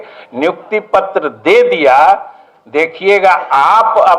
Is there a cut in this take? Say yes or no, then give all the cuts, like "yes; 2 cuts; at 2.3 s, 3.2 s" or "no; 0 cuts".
no; 0 cuts